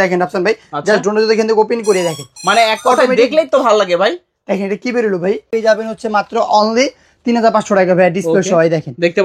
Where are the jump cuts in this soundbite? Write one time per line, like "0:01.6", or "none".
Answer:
0:05.5